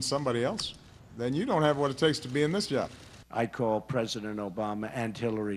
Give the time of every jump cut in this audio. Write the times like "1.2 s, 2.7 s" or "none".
3.2 s